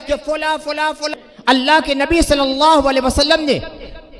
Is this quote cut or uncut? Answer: cut